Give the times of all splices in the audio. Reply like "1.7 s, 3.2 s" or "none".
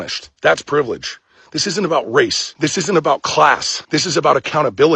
3.7 s